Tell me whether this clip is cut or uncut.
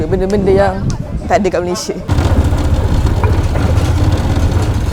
uncut